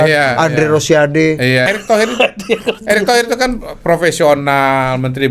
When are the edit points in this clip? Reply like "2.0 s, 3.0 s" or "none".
1.7 s